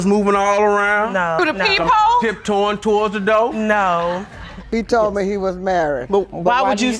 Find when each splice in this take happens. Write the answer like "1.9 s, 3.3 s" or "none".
4.7 s